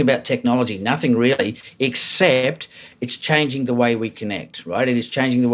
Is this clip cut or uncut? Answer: uncut